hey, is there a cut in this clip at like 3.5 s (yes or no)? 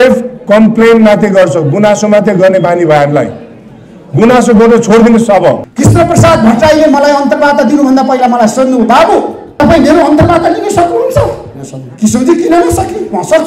no